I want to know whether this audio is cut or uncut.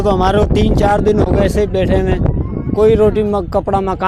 uncut